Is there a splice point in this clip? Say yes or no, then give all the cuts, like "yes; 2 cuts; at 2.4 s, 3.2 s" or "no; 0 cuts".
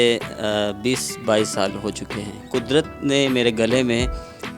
yes; 1 cut; at 2.4 s